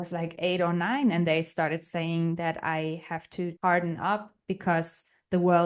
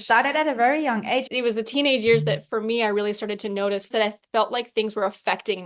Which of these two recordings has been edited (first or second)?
second